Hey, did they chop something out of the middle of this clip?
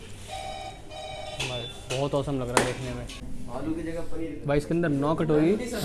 yes; 1 cut; at 3.3 s

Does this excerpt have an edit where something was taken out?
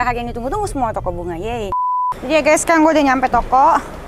yes; 1 cut; at 2.1 s

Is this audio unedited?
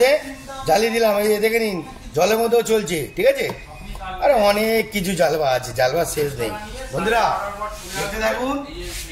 yes; 0 cuts

